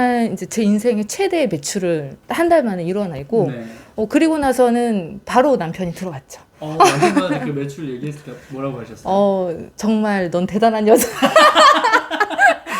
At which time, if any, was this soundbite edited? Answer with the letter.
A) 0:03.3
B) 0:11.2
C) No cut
C